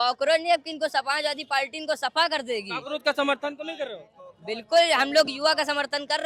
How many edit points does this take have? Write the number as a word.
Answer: zero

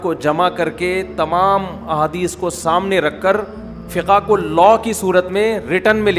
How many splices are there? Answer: one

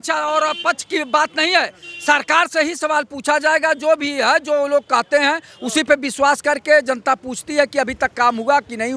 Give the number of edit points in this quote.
zero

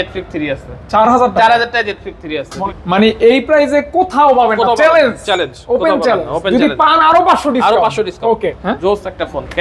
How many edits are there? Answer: two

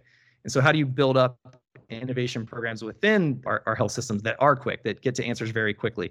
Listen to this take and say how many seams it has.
zero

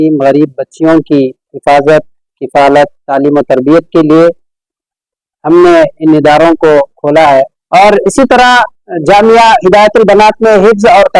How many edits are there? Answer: one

